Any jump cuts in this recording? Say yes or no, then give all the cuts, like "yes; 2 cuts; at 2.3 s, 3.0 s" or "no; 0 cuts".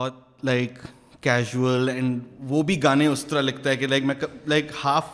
no; 0 cuts